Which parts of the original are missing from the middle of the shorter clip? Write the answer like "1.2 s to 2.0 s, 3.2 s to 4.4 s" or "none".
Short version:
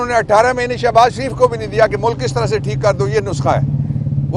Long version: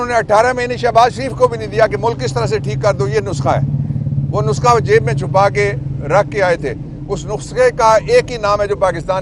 none